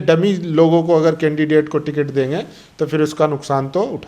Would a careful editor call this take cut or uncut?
uncut